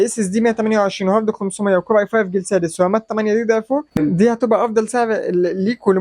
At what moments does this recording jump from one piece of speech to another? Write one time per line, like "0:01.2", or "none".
0:04.0